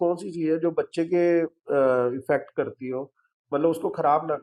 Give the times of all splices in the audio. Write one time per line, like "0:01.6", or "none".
none